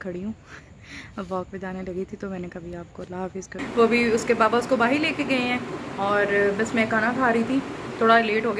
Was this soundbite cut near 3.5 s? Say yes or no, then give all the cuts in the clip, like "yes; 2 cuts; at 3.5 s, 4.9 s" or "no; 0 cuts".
yes; 1 cut; at 3.5 s